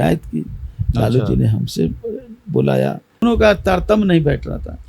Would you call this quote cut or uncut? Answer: cut